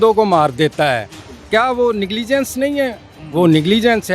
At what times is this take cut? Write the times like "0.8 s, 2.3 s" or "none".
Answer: none